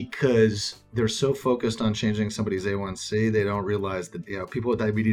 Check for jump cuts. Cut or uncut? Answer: cut